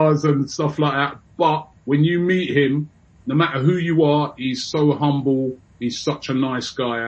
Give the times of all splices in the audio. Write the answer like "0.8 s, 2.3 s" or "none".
1.7 s, 5.7 s